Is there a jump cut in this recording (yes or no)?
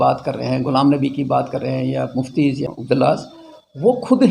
yes